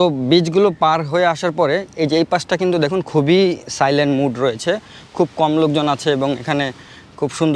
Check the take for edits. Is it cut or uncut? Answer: uncut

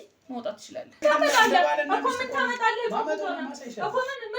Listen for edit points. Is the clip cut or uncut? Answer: cut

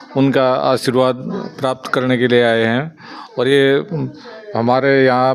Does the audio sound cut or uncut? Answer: uncut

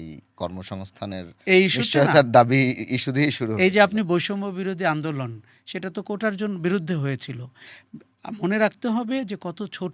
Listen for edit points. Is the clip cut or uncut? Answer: uncut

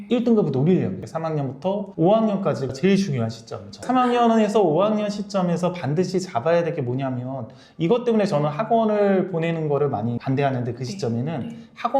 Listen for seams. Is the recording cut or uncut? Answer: cut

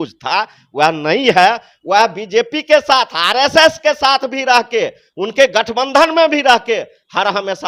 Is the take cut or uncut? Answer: uncut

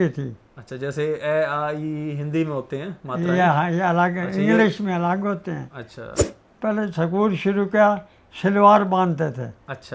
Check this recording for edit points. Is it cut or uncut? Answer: cut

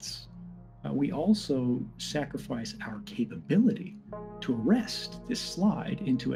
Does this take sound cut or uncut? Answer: uncut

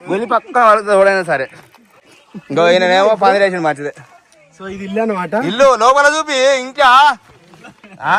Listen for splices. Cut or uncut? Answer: uncut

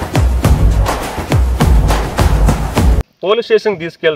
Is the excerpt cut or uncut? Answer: cut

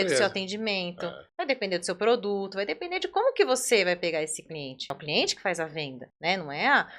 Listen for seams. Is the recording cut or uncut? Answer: cut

